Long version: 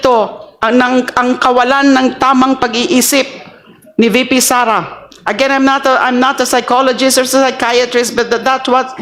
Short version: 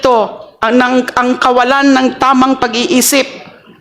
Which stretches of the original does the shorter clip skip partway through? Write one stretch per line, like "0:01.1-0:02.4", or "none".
none